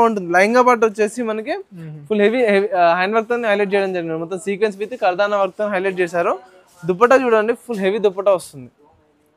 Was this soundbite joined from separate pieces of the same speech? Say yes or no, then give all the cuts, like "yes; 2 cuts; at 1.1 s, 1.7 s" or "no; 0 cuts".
no; 0 cuts